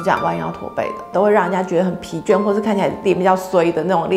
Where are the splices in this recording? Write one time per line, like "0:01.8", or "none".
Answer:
0:01.1
0:03.0